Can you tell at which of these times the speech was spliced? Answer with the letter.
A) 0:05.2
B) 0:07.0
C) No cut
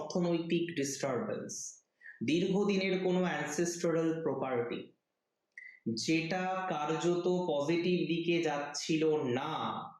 C